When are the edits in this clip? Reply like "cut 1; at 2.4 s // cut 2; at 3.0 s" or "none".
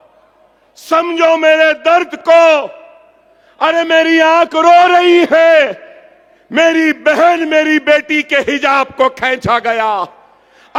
none